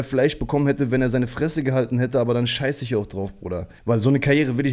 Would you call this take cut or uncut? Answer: cut